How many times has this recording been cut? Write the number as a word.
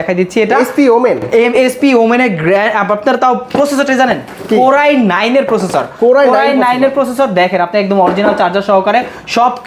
zero